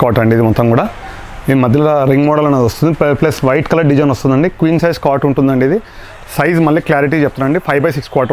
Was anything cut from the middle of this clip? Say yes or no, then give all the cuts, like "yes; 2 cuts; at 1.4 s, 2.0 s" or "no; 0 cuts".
no; 0 cuts